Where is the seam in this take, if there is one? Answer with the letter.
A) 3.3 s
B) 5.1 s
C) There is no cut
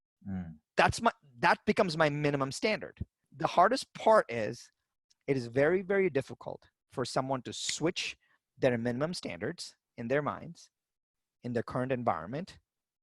A